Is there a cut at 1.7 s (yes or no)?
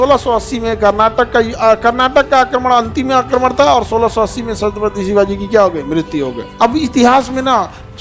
no